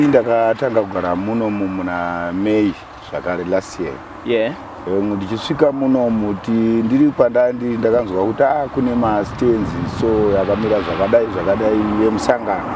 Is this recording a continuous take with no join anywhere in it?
yes; 0 cuts

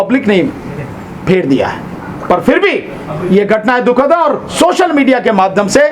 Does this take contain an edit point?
no; 0 cuts

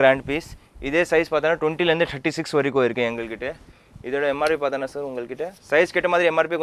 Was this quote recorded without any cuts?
yes; 0 cuts

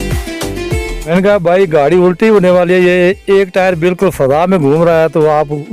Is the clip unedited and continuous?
no; 1 cut; at 1.0 s

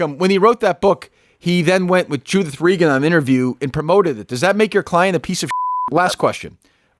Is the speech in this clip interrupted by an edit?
yes; 1 cut; at 5.6 s

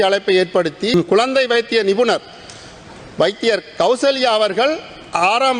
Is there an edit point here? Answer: yes; 1 cut; at 0.9 s

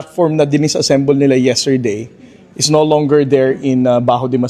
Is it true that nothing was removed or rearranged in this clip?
yes; 0 cuts

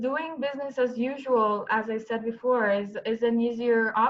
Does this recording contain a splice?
no; 0 cuts

